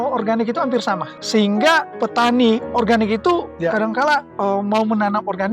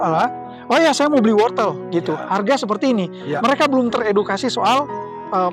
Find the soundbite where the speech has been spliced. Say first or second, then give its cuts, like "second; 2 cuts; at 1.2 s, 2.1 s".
first; 3 cuts; at 1.1 s, 1.9 s, 4.3 s